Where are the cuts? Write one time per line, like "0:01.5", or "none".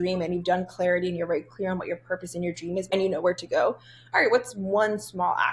0:02.9